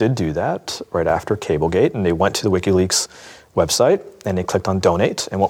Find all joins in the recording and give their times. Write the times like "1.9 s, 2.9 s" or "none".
none